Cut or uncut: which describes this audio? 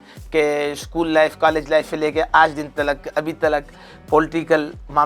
uncut